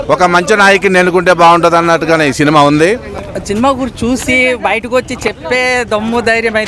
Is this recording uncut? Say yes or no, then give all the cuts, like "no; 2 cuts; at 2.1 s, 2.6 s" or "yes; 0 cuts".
no; 1 cut; at 3.3 s